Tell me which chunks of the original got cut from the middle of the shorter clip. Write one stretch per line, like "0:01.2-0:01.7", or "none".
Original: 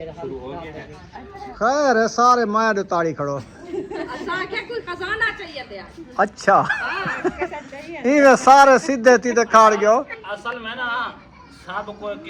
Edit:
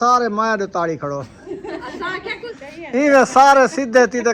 0:03.5-0:03.6
0:04.8-0:07.7

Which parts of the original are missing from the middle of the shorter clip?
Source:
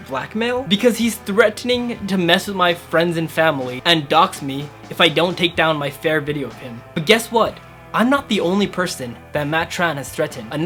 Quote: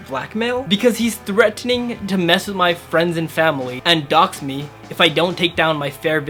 none

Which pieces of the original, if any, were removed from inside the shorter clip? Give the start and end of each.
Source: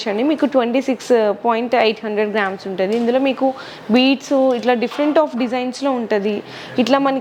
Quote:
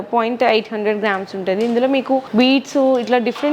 0:03.6-0:03.8

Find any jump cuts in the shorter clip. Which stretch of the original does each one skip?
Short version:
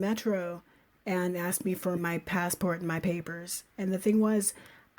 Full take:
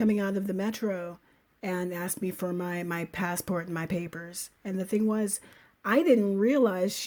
0:02.5-0:02.8

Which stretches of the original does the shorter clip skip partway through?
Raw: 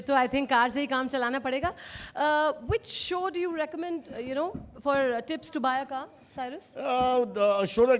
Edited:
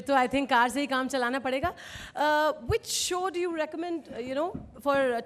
none

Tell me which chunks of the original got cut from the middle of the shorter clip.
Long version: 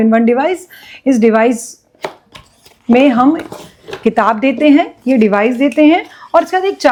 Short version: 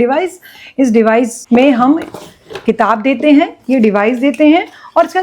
0:01.7-0:02.8

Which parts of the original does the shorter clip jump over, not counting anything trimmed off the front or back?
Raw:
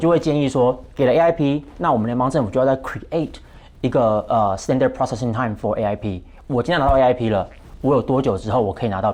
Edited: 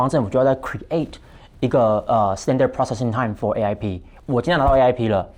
none

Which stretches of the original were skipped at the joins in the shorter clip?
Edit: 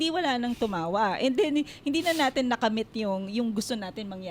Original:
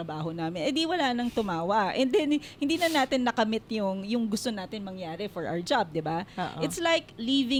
none

